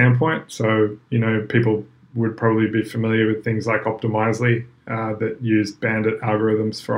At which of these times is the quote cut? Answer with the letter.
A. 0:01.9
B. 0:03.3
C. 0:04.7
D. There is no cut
D